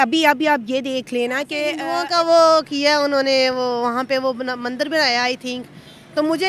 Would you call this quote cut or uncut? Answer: cut